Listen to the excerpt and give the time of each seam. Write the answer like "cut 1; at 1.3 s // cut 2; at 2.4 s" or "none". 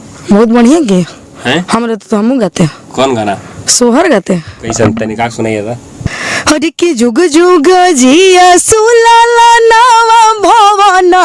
cut 1; at 6.0 s